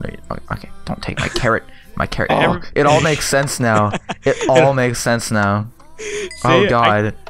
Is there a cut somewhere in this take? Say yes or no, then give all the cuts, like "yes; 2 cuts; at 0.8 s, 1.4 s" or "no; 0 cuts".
no; 0 cuts